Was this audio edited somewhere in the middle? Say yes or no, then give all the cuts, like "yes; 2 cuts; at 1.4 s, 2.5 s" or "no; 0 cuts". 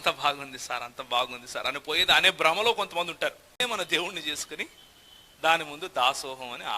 yes; 1 cut; at 3.5 s